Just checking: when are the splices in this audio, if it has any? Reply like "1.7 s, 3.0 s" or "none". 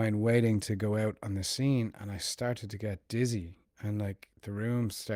none